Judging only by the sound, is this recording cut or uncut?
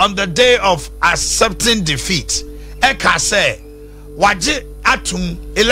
uncut